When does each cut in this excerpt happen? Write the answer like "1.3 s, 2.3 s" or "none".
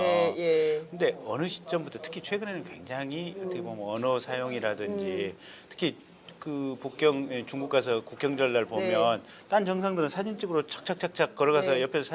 9.5 s

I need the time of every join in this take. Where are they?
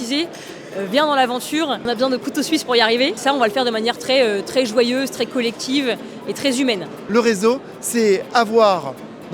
1.8 s, 3.2 s, 7.0 s

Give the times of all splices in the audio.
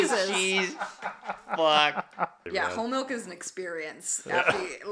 2.5 s

